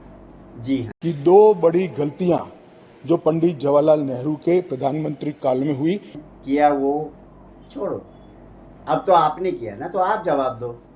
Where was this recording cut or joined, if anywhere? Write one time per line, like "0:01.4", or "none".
0:00.9
0:06.2